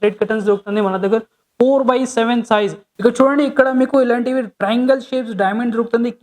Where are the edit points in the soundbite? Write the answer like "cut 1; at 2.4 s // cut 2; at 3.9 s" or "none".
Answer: cut 1; at 2.9 s